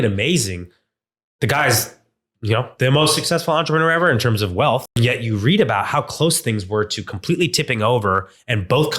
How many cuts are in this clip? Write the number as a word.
one